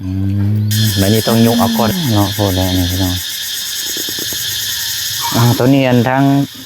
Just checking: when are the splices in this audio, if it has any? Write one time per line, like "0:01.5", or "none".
0:01.5